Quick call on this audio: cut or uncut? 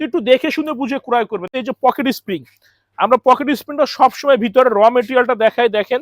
cut